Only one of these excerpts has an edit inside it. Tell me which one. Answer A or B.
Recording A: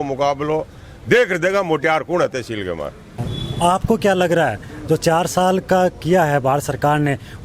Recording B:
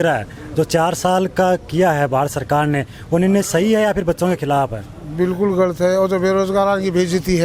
A